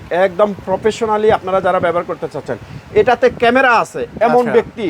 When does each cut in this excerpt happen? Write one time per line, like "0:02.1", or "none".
none